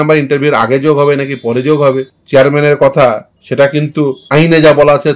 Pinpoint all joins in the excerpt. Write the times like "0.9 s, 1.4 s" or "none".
2.2 s, 3.3 s, 4.2 s

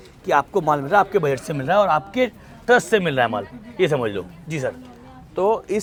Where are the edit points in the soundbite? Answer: none

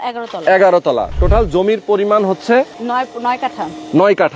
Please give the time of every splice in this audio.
2.8 s

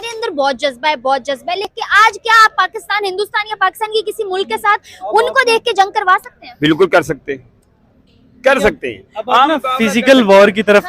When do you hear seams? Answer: 1.7 s

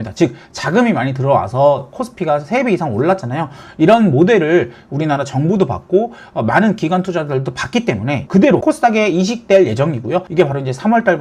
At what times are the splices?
8.2 s, 10.3 s

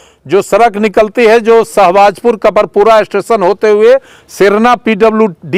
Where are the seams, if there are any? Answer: none

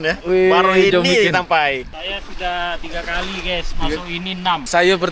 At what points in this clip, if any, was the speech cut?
none

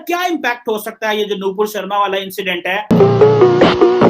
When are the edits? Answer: 2.7 s

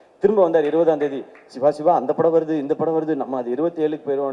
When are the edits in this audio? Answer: none

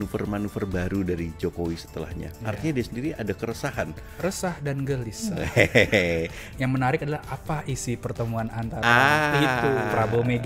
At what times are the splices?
6.5 s

